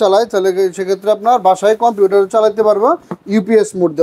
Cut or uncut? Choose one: uncut